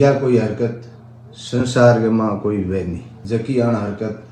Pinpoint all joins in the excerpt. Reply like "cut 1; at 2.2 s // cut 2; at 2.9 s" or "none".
cut 1; at 3.1 s